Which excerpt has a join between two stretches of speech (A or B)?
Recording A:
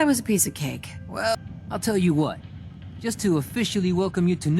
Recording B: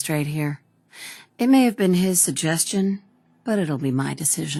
A